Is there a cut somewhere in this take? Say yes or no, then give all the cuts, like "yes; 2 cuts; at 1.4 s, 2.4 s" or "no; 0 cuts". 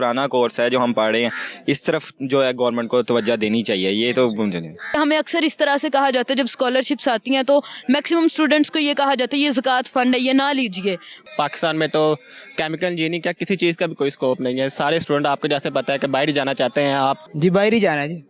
yes; 3 cuts; at 4.9 s, 11.2 s, 17.2 s